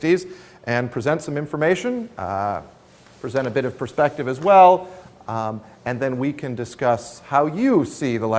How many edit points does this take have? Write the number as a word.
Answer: one